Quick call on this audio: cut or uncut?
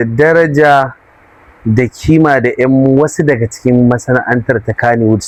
uncut